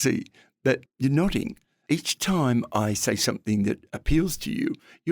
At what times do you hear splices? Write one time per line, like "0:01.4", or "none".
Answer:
0:00.9
0:01.7